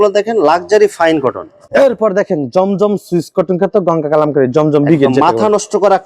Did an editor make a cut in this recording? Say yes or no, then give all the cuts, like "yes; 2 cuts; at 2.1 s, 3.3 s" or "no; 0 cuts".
yes; 1 cut; at 1.6 s